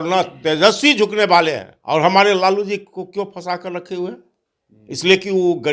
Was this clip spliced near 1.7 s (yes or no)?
yes